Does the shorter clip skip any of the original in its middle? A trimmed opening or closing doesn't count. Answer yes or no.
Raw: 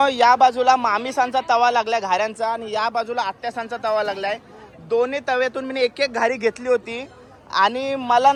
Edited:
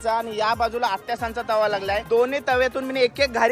yes